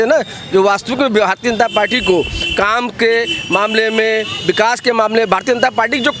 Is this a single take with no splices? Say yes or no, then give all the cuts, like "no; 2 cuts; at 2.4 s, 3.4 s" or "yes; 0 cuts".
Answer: yes; 0 cuts